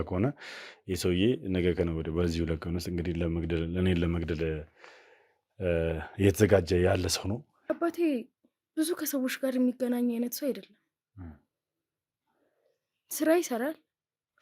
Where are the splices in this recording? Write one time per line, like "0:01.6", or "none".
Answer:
0:07.5

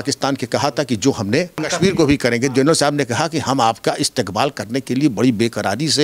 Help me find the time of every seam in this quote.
0:01.7

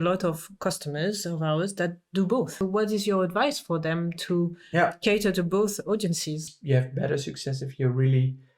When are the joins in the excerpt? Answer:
0:02.5
0:06.4

